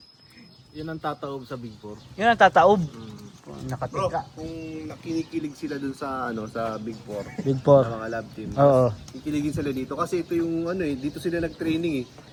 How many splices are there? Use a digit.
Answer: 0